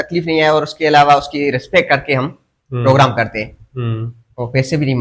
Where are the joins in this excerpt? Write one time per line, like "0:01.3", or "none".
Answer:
none